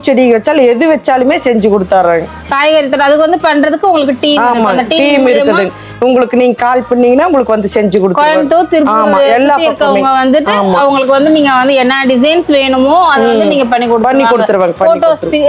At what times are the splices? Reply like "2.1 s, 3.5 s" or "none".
none